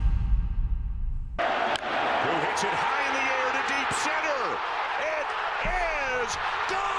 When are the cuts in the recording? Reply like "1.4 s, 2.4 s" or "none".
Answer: 1.4 s